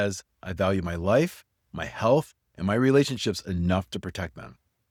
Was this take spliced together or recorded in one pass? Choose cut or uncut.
uncut